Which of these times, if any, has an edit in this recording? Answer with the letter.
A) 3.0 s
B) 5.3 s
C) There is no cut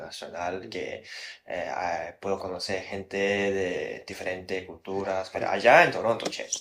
B